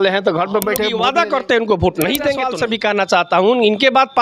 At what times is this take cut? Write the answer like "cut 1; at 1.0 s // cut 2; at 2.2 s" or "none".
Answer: cut 1; at 1.0 s // cut 2; at 2.6 s